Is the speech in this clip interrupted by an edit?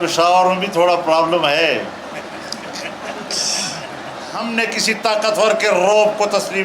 yes; 1 cut; at 4.4 s

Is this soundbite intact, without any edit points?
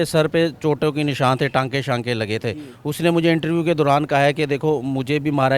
yes; 0 cuts

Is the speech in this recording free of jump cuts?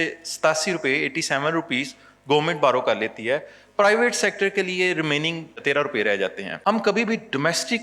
no; 2 cuts; at 5.6 s, 6.5 s

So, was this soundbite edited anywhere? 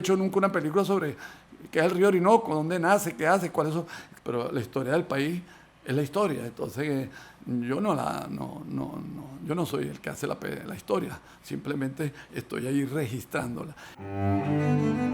yes; 2 cuts; at 4.0 s, 13.9 s

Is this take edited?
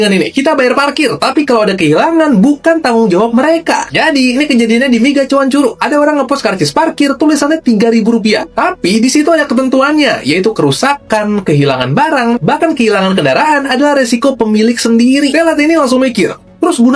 no; 0 cuts

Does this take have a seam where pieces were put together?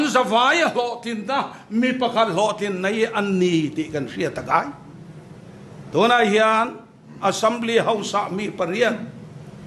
no; 0 cuts

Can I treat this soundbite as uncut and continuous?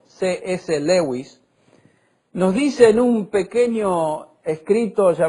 no; 1 cut; at 3.8 s

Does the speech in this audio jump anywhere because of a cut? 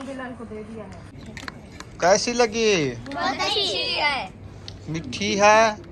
yes; 1 cut; at 1.2 s

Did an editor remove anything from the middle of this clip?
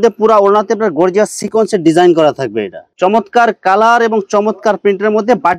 yes; 1 cut; at 2.9 s

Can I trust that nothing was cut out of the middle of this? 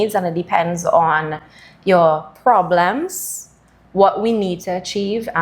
yes; 0 cuts

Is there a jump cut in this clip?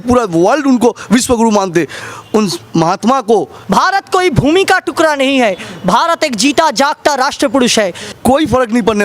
yes; 2 cuts; at 3.6 s, 8.0 s

